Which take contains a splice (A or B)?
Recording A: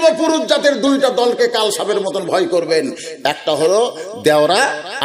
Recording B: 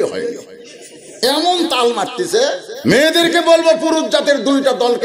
B